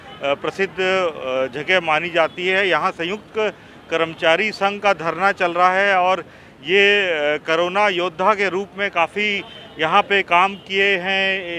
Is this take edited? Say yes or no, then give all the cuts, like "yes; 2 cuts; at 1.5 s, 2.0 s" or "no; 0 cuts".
no; 0 cuts